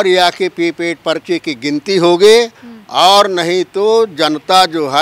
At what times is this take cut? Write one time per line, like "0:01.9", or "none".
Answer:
none